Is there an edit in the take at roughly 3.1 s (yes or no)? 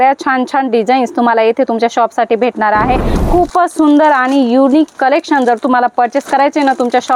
yes